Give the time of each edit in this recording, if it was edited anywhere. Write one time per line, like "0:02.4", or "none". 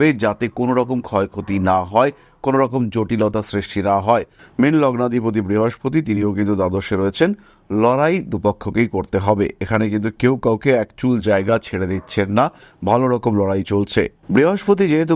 0:04.4